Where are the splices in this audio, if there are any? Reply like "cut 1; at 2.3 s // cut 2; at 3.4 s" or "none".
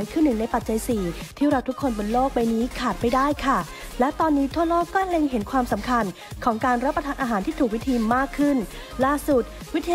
none